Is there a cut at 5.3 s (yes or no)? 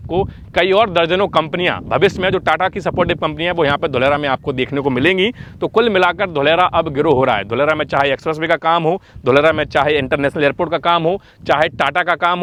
no